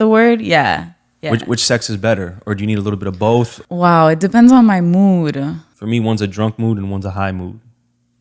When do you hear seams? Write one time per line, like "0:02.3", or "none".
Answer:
0:03.6
0:05.7